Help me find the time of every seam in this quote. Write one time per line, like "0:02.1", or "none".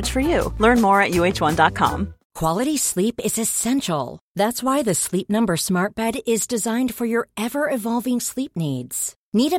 0:02.2